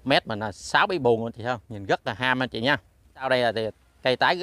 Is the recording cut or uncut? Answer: cut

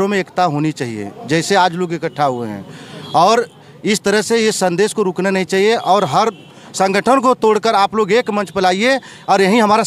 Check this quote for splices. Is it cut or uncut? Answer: uncut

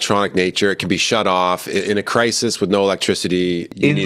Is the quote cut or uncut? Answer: uncut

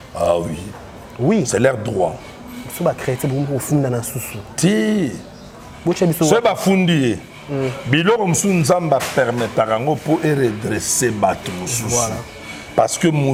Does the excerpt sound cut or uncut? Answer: uncut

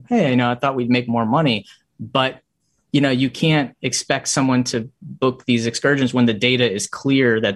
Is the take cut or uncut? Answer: uncut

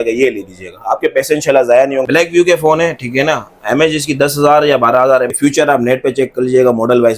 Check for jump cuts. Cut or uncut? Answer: cut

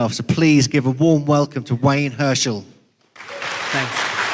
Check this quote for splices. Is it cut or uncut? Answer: uncut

